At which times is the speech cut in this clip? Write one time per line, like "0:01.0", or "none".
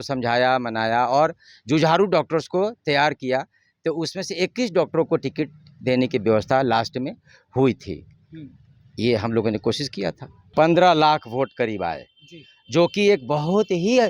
0:10.3